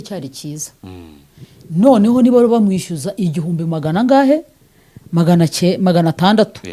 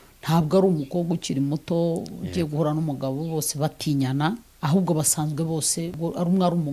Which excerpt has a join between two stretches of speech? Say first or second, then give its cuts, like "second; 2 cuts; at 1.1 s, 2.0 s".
second; 2 cuts; at 4.5 s, 5.9 s